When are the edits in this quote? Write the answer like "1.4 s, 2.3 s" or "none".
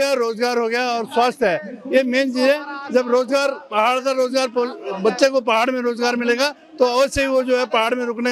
none